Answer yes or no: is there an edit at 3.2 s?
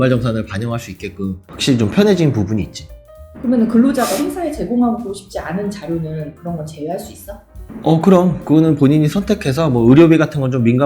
no